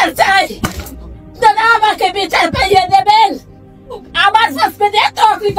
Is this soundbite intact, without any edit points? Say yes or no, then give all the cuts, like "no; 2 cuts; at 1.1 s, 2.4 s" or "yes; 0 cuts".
yes; 0 cuts